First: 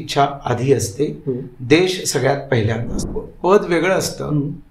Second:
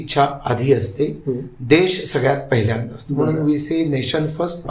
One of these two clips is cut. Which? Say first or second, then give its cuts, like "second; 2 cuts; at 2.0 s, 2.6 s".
first; 1 cut; at 3.0 s